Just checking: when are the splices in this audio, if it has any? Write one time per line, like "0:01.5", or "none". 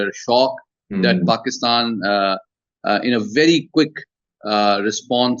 none